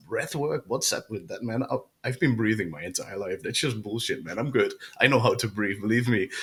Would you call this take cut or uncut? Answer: uncut